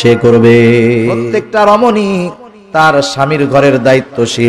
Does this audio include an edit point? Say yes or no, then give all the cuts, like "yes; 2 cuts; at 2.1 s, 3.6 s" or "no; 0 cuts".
yes; 1 cut; at 1.1 s